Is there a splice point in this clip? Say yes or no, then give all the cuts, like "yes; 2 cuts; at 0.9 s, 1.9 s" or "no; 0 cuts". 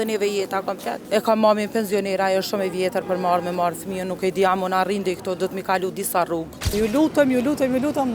yes; 2 cuts; at 1.0 s, 6.7 s